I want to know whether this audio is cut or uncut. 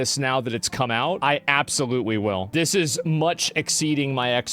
cut